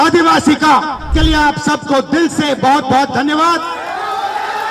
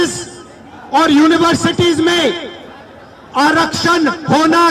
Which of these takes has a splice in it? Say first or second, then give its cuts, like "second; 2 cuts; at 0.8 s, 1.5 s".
first; 1 cut; at 1.1 s